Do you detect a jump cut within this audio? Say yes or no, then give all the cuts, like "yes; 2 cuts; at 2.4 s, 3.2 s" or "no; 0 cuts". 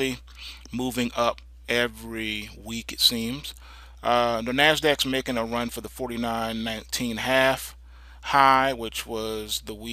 no; 0 cuts